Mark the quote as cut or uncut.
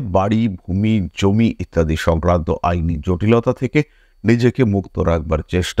uncut